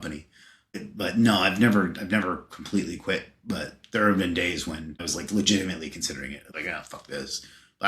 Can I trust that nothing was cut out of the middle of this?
no; 3 cuts; at 0.7 s, 5.1 s, 6.4 s

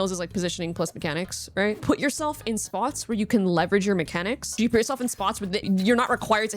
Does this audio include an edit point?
yes; 3 cuts; at 1.8 s, 4.4 s, 5.6 s

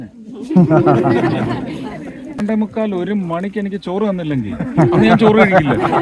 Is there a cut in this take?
yes; 1 cut; at 2.4 s

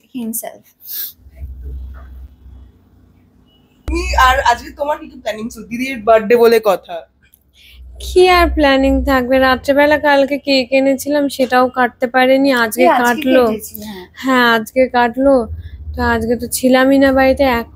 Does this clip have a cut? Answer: no; 0 cuts

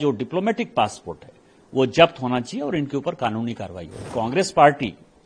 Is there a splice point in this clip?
yes; 1 cut; at 4.1 s

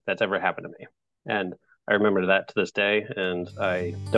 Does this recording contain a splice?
no; 0 cuts

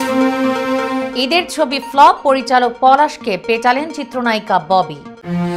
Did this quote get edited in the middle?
yes; 1 cut; at 1.0 s

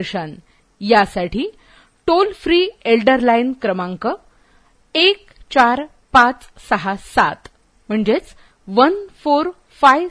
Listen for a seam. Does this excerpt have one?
no; 0 cuts

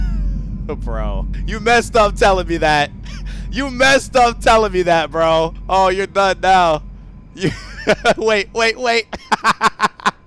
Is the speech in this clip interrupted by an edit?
no; 0 cuts

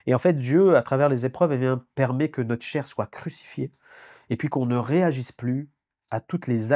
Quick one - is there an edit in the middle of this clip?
no; 0 cuts

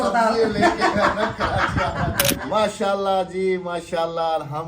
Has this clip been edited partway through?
yes; 1 cut; at 2.4 s

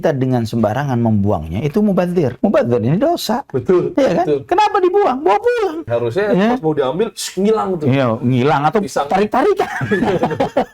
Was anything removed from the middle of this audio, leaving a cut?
yes; 2 cuts; at 2.4 s, 5.8 s

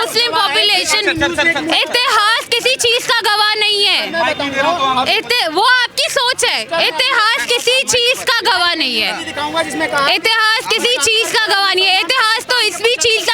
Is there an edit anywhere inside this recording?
no; 0 cuts

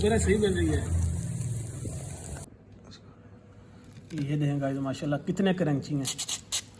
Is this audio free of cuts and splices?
no; 1 cut; at 2.5 s

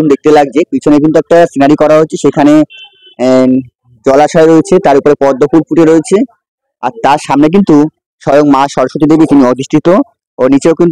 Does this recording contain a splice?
no; 0 cuts

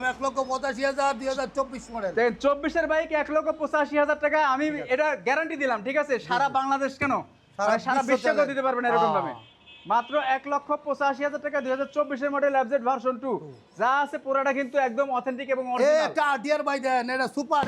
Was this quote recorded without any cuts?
yes; 0 cuts

